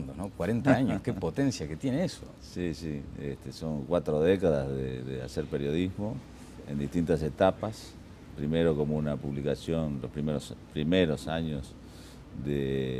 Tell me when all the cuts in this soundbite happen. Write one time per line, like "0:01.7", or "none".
0:08.6